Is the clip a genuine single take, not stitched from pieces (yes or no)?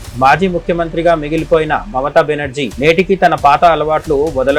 yes